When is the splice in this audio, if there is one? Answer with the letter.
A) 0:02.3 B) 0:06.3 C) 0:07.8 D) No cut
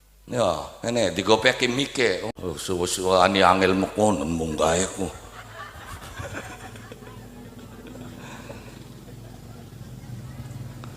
A